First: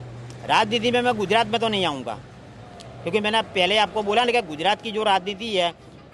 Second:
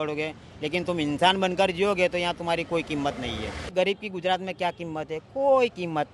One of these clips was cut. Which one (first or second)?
second